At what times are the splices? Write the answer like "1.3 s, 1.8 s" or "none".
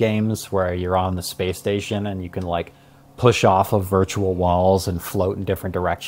none